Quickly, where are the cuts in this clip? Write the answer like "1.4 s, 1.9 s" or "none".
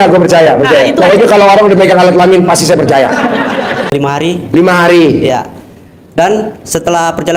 3.9 s

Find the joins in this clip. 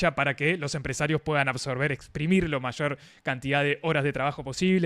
none

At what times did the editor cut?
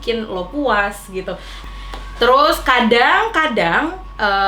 1.6 s

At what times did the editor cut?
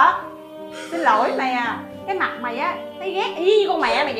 none

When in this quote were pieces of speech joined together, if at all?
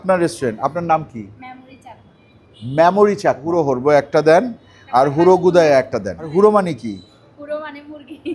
3.5 s, 6.3 s

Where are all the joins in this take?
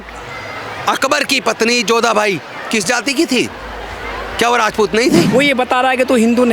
5.3 s

